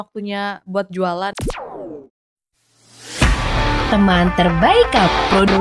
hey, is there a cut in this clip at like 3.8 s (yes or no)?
no